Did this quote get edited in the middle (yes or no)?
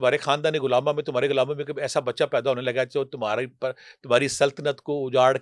no